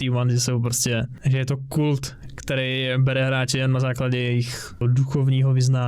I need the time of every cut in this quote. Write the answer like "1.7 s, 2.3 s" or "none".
4.8 s